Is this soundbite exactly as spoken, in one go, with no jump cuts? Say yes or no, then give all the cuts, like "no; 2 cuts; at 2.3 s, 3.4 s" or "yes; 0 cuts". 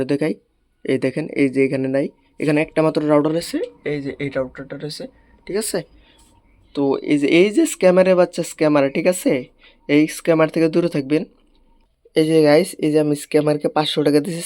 yes; 0 cuts